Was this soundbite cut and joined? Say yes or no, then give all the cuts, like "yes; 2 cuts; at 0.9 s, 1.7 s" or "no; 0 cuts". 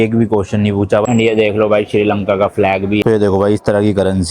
yes; 2 cuts; at 1.0 s, 3.0 s